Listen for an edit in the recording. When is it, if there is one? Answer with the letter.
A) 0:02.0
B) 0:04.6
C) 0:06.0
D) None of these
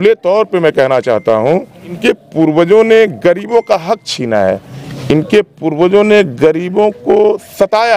A